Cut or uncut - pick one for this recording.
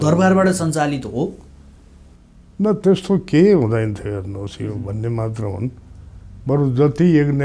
uncut